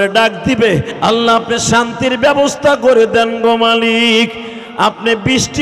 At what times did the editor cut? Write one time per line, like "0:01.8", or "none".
0:00.9